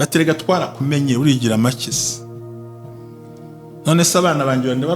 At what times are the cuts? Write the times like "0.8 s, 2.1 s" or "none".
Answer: none